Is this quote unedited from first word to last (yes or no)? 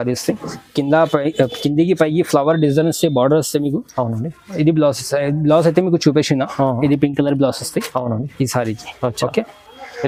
yes